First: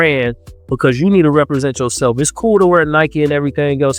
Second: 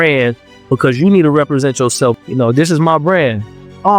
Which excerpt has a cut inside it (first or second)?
second